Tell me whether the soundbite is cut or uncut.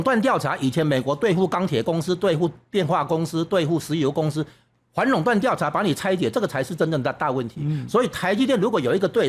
uncut